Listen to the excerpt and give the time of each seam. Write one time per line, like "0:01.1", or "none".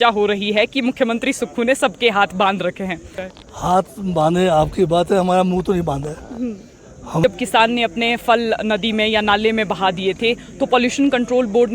0:03.2
0:07.2